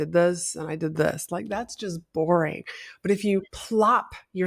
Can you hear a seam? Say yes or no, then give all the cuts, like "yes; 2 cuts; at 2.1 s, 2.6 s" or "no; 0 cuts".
yes; 1 cut; at 3.6 s